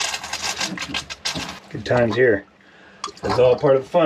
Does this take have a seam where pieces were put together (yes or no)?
yes